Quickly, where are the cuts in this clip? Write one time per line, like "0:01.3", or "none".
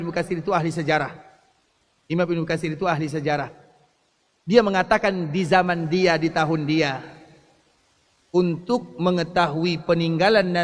none